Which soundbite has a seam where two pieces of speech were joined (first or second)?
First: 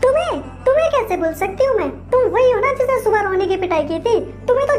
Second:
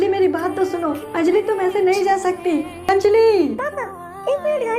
second